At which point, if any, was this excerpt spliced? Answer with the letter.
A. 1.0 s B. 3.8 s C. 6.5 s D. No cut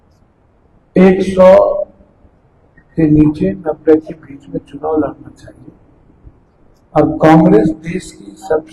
C